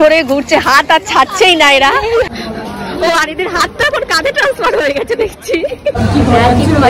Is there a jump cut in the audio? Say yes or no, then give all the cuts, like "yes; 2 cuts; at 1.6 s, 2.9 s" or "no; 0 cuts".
yes; 2 cuts; at 2.3 s, 6.0 s